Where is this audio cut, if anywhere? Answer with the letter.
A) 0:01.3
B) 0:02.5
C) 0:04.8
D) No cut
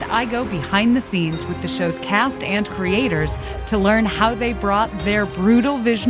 D